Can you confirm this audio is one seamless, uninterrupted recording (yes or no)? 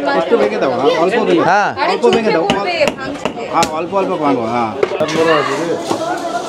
no